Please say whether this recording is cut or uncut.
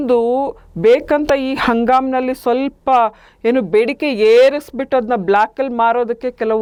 uncut